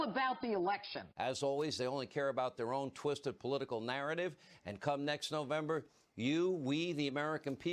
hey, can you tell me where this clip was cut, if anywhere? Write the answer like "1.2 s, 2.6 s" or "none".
1.0 s